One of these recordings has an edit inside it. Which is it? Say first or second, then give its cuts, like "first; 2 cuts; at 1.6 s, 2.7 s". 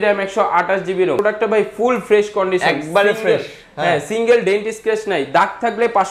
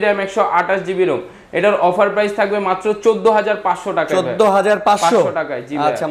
first; 1 cut; at 1.2 s